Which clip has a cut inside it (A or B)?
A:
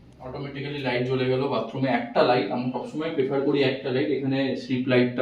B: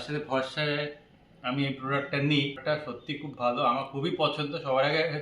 B